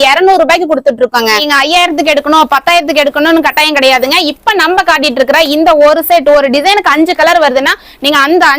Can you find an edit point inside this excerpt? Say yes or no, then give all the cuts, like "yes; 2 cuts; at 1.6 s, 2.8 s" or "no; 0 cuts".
yes; 1 cut; at 1.4 s